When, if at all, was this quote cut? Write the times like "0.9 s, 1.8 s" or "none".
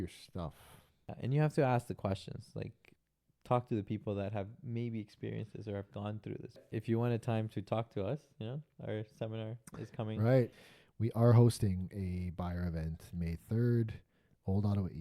1.1 s, 2.9 s, 6.7 s, 10.5 s

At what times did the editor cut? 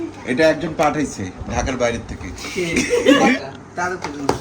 3.3 s

